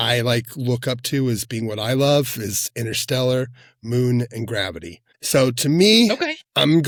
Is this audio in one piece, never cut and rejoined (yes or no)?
yes